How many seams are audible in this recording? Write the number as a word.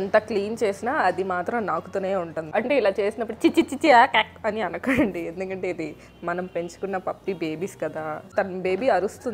two